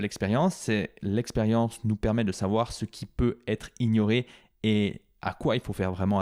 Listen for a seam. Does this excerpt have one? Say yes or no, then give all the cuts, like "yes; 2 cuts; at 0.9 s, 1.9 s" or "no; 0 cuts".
no; 0 cuts